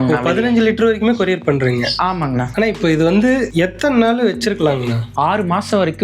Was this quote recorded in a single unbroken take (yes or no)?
no